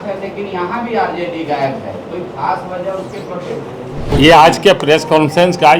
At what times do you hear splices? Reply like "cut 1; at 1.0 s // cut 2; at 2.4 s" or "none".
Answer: cut 1; at 4.1 s

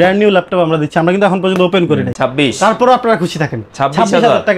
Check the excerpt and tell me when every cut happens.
cut 1; at 2.1 s

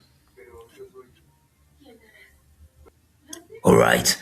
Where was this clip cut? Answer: cut 1; at 2.6 s

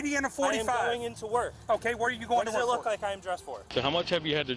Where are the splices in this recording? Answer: cut 1; at 3.6 s

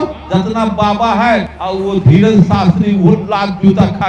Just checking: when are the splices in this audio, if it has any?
cut 1; at 1.6 s

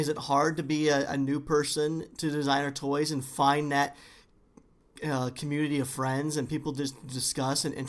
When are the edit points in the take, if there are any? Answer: none

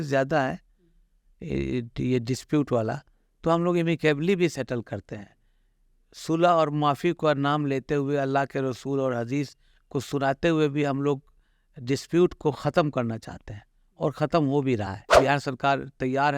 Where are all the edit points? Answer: cut 1; at 15.1 s

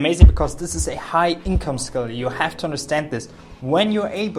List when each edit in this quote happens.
none

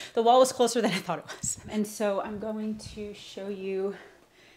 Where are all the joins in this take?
cut 1; at 1.6 s

